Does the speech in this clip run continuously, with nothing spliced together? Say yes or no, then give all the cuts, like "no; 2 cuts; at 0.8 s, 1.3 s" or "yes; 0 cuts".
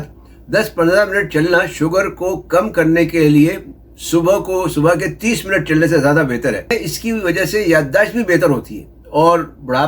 no; 1 cut; at 6.7 s